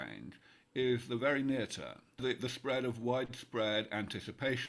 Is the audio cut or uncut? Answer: cut